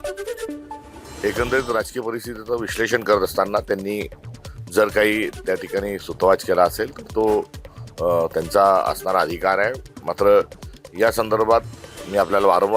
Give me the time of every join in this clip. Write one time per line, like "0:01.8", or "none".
0:01.1